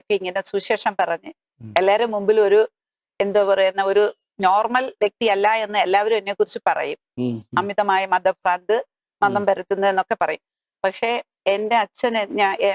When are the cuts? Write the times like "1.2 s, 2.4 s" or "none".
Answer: none